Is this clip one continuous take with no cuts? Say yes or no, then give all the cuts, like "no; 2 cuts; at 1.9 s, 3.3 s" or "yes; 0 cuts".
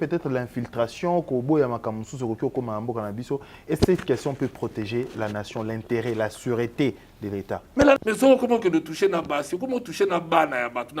no; 1 cut; at 8.0 s